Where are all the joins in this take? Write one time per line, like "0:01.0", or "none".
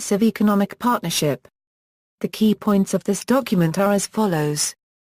0:01.1